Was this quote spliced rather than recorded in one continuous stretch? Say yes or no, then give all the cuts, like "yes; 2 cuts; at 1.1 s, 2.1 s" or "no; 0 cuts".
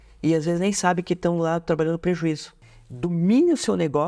yes; 1 cut; at 2.6 s